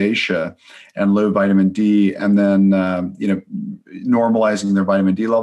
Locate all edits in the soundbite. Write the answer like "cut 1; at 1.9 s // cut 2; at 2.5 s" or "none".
none